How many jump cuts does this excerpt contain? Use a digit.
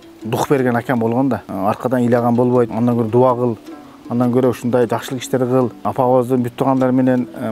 3